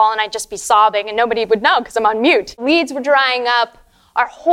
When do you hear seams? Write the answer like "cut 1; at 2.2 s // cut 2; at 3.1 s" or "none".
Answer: cut 1; at 2.6 s